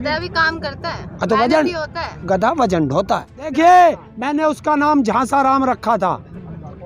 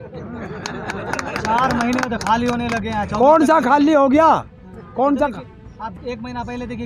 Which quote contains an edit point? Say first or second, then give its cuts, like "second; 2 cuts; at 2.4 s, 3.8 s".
first; 1 cut; at 3.5 s